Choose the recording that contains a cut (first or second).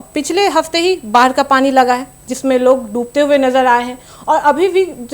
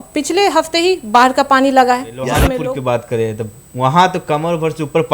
second